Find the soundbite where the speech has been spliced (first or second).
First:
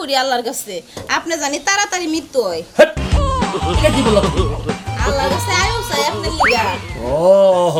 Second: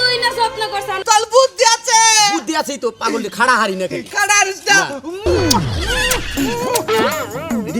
second